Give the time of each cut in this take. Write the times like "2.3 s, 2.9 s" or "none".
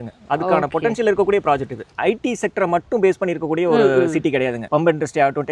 1.9 s, 4.6 s